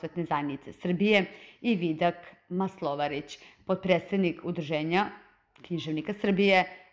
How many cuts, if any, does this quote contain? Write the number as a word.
one